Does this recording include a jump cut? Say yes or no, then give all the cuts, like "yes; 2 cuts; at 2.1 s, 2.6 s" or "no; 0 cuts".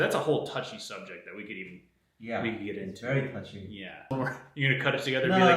yes; 1 cut; at 4.1 s